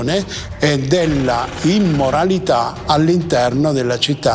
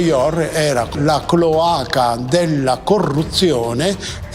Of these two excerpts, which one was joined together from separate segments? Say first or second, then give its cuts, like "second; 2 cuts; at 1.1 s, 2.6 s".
second; 1 cut; at 0.9 s